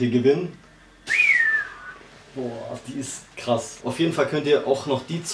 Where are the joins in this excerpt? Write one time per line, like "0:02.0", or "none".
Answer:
0:00.9
0:03.8